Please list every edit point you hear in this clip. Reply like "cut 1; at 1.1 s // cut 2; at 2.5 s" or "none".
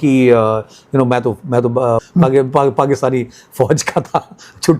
cut 1; at 2.0 s